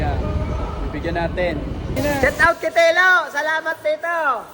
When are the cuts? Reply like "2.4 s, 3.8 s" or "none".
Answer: 2.0 s